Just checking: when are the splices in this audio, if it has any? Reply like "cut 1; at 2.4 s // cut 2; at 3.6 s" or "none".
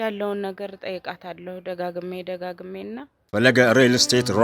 cut 1; at 3.2 s